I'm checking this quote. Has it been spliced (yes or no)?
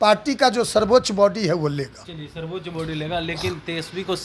no